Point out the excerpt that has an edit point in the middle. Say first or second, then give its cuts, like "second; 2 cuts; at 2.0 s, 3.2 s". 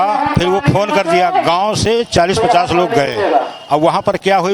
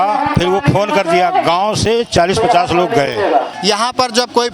second; 1 cut; at 3.5 s